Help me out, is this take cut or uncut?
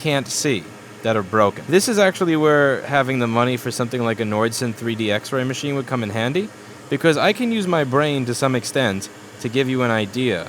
cut